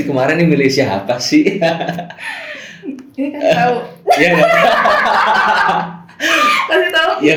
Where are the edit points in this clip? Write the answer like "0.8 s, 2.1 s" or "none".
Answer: none